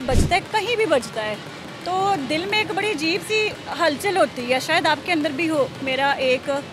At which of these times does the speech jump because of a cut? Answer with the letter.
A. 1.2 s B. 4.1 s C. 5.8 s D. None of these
C